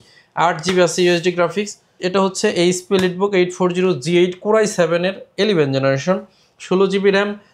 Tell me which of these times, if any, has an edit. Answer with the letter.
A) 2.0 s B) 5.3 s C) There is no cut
A